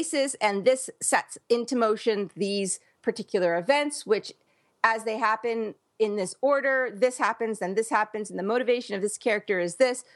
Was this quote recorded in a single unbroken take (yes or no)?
yes